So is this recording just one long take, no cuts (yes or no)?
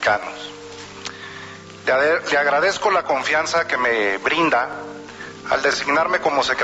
yes